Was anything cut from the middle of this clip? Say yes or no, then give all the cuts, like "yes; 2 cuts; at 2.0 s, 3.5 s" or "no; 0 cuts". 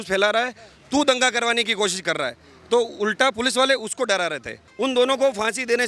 yes; 1 cut; at 4.6 s